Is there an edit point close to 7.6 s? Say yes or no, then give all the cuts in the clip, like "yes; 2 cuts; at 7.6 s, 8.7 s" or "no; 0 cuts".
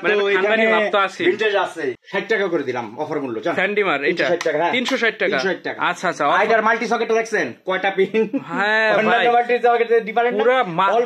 no; 1 cut; at 2.0 s